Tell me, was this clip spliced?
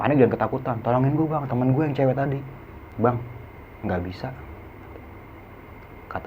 yes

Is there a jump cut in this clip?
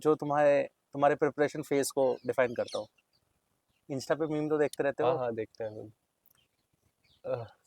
no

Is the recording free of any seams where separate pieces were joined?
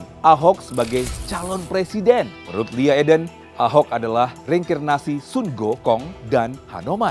no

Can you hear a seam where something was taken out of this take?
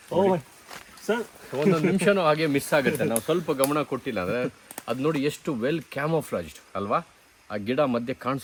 no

